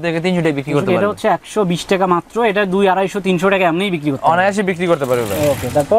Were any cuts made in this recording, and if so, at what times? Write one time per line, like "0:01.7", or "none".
none